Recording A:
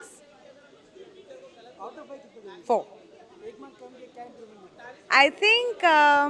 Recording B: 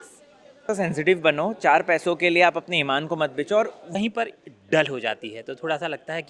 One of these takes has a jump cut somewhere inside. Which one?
B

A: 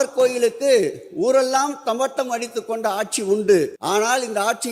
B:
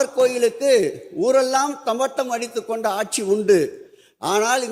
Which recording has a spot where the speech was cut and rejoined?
A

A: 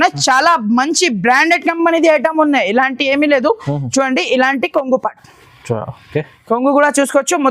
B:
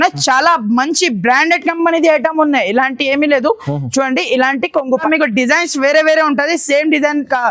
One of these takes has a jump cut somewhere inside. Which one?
B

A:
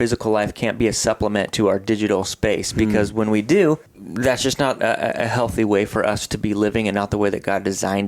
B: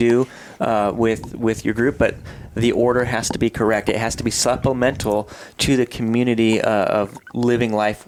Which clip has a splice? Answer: A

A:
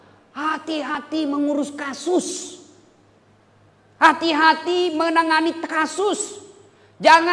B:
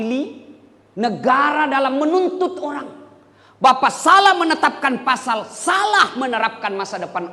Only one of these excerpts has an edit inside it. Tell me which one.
A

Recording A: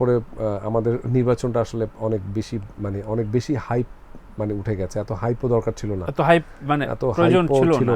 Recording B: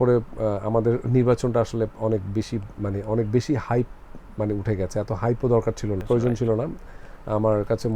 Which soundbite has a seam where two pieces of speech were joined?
B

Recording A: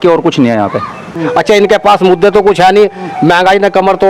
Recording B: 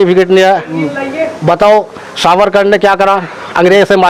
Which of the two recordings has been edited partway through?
A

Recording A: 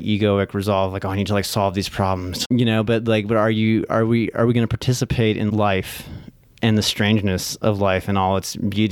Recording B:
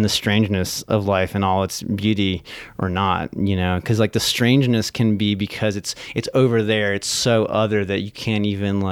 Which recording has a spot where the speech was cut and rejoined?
A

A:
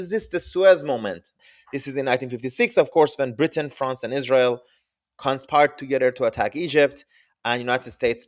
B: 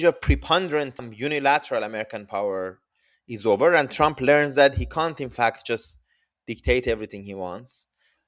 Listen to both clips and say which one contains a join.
A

